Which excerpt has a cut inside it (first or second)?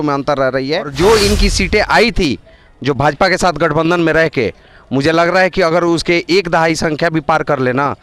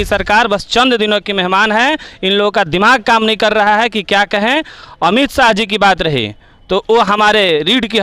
first